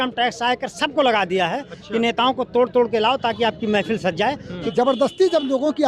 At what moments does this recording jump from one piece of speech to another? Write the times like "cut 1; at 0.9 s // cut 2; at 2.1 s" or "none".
cut 1; at 4.7 s